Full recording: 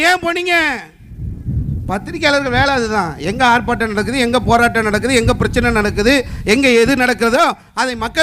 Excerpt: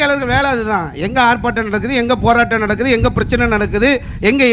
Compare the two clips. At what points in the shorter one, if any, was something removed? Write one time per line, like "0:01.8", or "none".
none